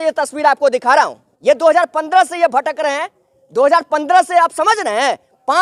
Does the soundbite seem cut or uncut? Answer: cut